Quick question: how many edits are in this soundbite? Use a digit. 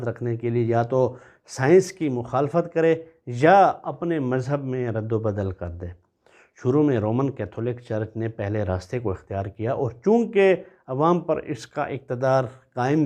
0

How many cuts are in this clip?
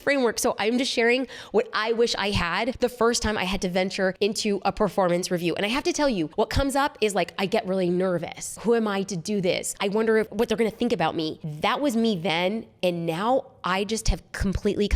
5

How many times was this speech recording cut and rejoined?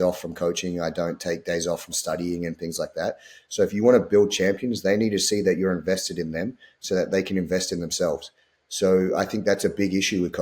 0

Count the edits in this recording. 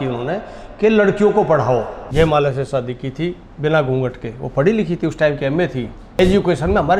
2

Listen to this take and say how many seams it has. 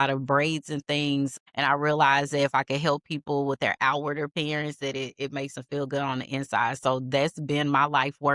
1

